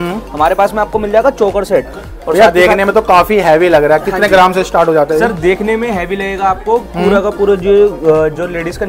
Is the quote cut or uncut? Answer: uncut